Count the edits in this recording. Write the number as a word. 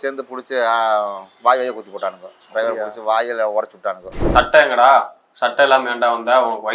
one